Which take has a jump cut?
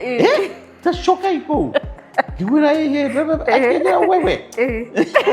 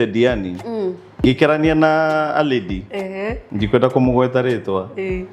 second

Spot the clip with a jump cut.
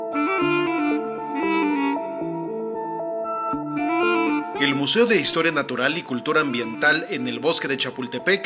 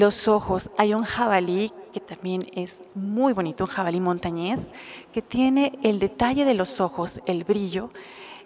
second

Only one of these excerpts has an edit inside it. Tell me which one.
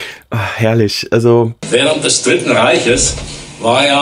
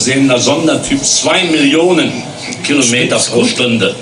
first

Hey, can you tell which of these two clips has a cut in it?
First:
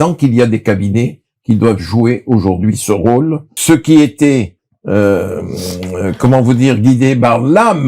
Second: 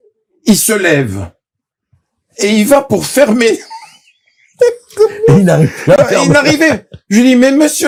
first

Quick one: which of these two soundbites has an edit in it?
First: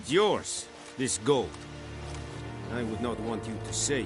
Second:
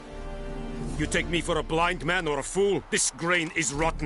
second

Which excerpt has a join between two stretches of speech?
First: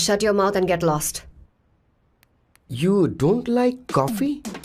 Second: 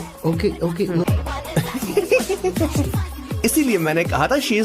second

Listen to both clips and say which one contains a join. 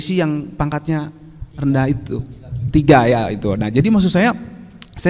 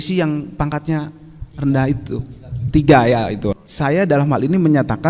second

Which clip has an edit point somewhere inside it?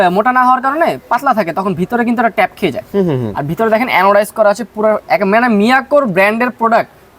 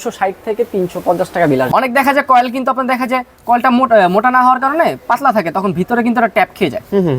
second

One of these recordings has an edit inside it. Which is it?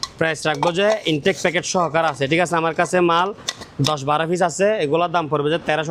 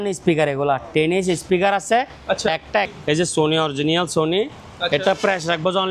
second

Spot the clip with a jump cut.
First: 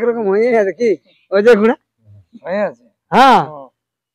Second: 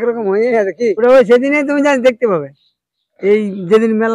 second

